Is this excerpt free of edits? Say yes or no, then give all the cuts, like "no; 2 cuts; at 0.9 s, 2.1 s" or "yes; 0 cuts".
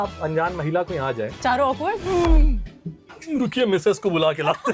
yes; 0 cuts